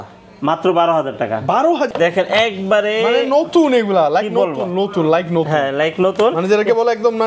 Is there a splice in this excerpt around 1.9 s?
yes; 1 cut; at 1.9 s

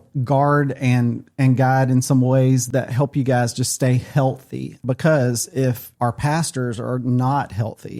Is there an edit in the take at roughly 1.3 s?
no; 3 cuts; at 2.6 s, 4.8 s, 5.9 s

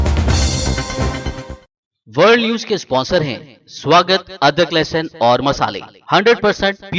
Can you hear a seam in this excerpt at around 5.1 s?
no; 1 cut; at 1.6 s

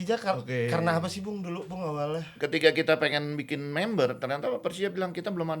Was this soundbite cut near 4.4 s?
no; 1 cut; at 2.3 s

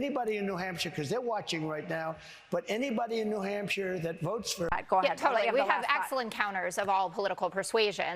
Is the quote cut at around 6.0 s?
no; 1 cut; at 4.7 s

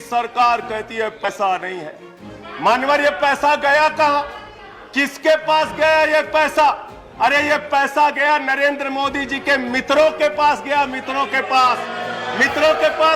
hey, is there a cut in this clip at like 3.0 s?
no; 1 cut; at 1.3 s

